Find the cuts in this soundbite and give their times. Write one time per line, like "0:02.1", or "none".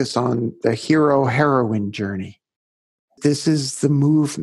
0:03.2